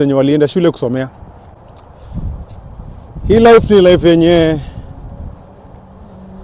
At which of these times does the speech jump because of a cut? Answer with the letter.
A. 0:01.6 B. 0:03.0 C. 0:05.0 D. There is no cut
A